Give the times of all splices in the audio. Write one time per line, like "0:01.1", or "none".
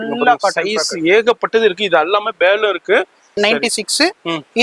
0:03.4